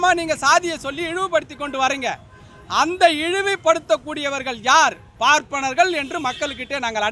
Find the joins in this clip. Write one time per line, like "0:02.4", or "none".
none